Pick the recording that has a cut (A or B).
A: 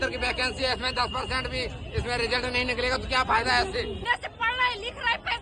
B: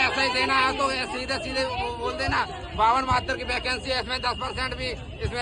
A